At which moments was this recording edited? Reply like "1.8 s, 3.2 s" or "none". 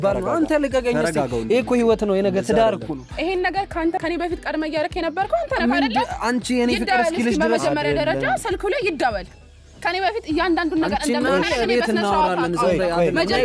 none